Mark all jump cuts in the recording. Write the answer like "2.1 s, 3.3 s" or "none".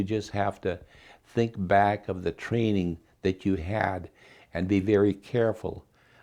none